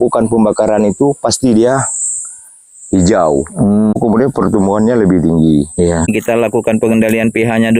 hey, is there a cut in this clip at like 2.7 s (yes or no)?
no